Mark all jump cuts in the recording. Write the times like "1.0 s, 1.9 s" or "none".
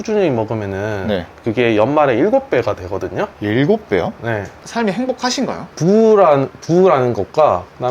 3.4 s, 4.6 s, 5.7 s